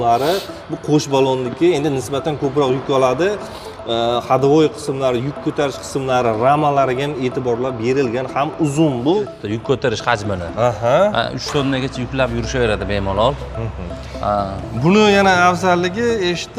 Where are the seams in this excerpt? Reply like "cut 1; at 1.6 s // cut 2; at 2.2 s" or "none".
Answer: cut 1; at 9.4 s